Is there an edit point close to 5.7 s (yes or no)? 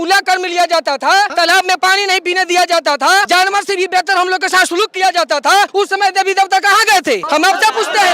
yes